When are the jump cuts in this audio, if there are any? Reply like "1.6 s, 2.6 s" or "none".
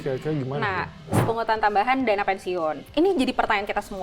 1.2 s, 2.8 s